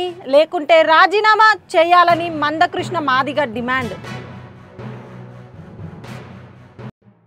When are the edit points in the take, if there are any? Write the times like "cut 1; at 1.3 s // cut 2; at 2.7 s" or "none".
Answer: cut 1; at 3.9 s